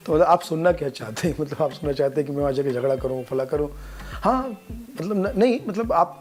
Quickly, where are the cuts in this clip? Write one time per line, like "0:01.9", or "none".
none